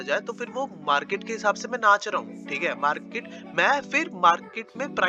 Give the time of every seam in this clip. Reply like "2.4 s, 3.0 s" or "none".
none